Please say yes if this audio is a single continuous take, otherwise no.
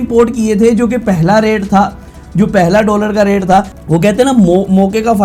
yes